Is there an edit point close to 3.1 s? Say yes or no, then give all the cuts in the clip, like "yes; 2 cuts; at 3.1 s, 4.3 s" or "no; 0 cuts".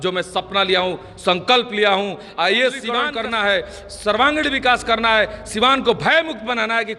yes; 1 cut; at 3.1 s